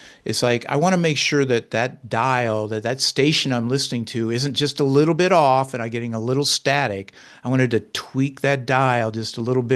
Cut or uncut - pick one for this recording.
uncut